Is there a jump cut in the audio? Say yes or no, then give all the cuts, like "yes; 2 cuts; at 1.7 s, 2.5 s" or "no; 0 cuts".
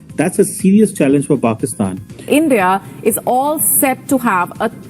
yes; 1 cut; at 2.1 s